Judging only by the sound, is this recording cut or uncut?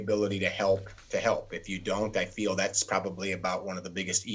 cut